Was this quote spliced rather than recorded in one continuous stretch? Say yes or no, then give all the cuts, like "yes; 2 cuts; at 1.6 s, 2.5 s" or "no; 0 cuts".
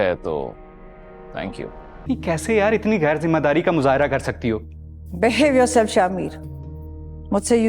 yes; 1 cut; at 2.0 s